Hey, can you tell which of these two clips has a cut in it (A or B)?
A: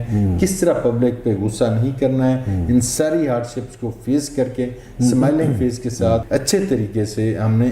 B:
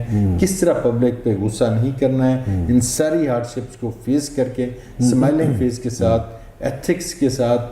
A